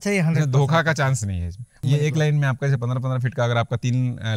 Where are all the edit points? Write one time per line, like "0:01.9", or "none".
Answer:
0:01.8